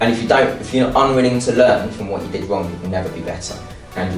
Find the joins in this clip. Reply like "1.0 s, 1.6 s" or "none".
none